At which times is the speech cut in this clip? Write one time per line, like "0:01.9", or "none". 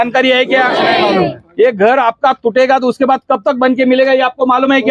none

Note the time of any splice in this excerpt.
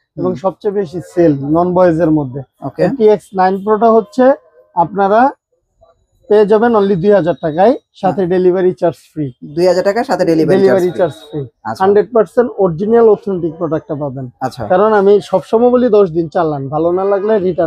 none

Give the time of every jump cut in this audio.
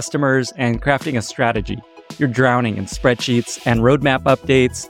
none

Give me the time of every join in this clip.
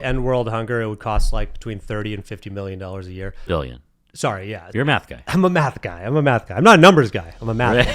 0:03.4
0:04.7

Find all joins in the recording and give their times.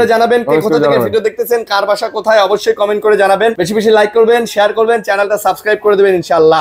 0:03.6

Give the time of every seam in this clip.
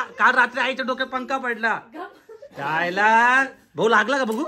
none

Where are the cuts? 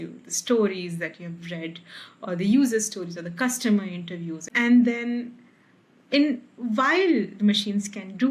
0:04.5

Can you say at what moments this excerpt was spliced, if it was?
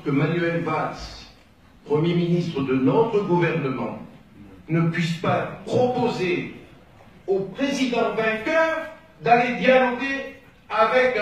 0:03.2

